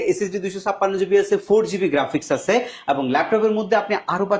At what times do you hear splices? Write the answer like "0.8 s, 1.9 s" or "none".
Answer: none

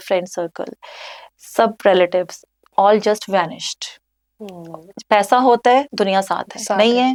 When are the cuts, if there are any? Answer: none

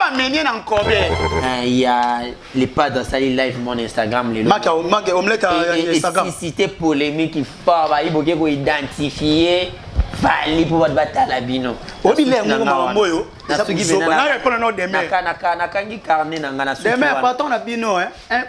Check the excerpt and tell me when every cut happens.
1.2 s

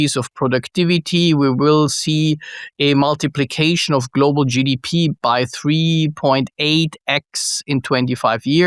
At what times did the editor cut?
none

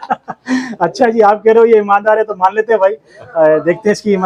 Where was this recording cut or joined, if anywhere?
none

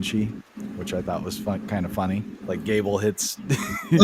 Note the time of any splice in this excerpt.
2.4 s

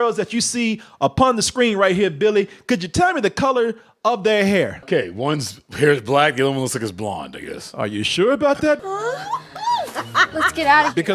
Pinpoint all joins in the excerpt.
4.8 s, 8.8 s

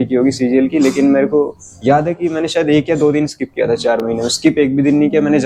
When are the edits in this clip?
none

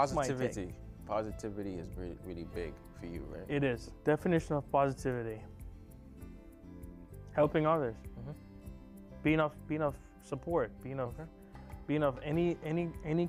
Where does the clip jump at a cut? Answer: 3.9 s

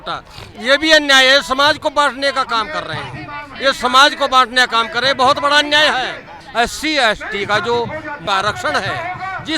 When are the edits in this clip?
6.3 s, 8.2 s

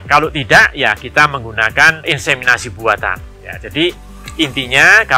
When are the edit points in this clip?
none

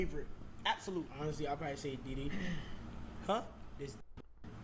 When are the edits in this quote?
1.1 s

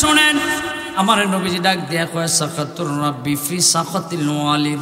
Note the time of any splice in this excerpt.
1.0 s

